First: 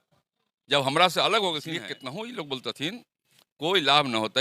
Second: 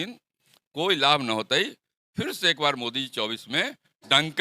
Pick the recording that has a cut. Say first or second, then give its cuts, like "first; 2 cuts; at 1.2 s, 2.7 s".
first; 1 cut; at 1.7 s